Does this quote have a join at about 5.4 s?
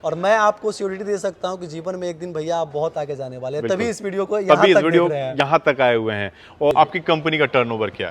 no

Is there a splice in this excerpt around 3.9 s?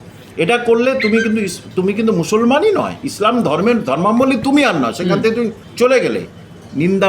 no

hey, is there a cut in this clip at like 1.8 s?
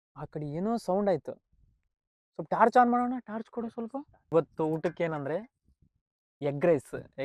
no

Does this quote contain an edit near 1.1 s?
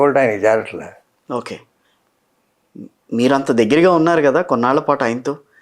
yes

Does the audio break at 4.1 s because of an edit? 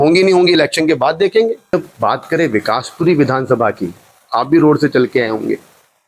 no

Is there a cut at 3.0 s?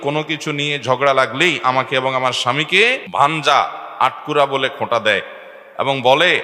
yes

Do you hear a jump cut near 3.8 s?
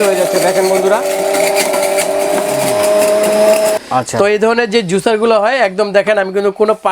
yes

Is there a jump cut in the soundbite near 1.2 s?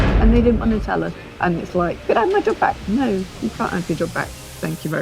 yes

